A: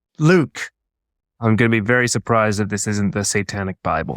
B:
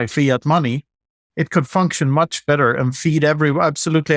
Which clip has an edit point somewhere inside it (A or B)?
A